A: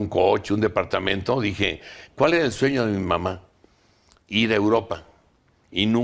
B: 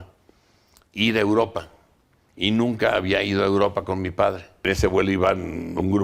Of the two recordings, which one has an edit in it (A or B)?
B